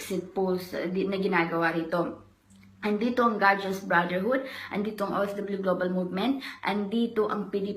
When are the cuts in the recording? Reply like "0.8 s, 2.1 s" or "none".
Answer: none